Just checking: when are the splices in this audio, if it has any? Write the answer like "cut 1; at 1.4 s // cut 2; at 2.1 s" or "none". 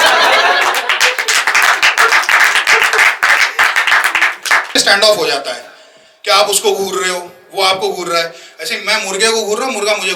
cut 1; at 4.7 s